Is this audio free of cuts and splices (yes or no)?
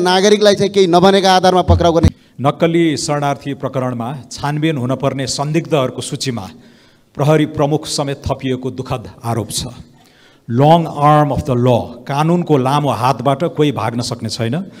no